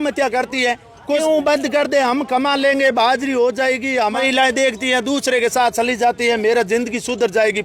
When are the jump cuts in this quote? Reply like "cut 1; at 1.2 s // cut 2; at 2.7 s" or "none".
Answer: cut 1; at 1.2 s // cut 2; at 4.0 s